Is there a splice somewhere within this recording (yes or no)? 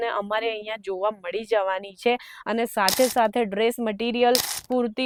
no